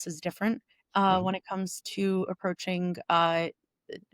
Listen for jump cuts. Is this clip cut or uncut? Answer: uncut